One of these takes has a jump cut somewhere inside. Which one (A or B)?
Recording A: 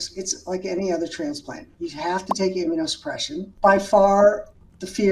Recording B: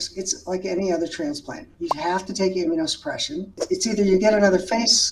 B